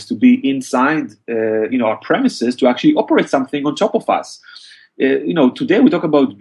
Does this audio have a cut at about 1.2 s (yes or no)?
no